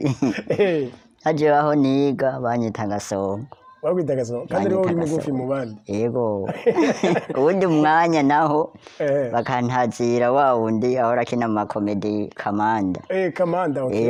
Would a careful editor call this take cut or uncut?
uncut